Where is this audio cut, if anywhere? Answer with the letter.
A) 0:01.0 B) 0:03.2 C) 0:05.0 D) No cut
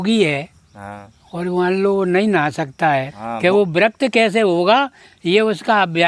B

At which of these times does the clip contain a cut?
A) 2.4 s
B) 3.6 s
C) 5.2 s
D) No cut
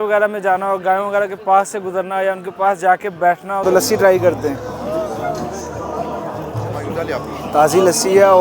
B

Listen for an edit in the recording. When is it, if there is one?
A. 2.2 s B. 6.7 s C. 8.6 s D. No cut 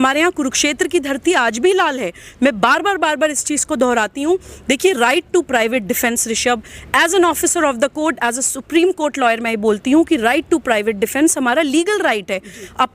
D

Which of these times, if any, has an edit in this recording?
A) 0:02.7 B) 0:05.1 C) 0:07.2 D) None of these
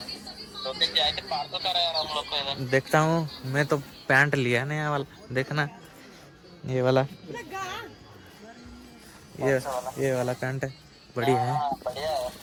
D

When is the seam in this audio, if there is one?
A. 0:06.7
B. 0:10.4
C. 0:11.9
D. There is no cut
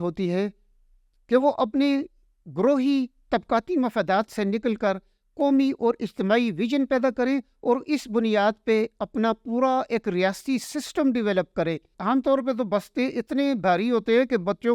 C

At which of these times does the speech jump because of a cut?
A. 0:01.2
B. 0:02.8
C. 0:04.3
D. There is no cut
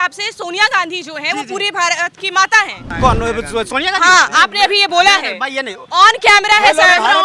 B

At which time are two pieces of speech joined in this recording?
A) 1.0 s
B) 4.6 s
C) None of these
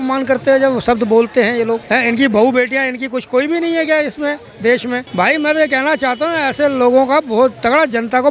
C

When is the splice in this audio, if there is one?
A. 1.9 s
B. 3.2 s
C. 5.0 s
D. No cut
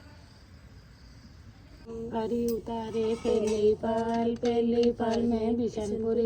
D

